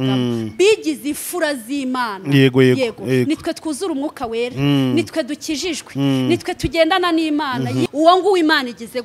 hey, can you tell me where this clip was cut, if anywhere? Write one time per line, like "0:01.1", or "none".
0:07.9